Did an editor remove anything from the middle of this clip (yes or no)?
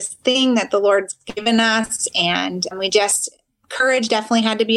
yes